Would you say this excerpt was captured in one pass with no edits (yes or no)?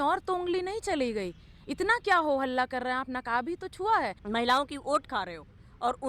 no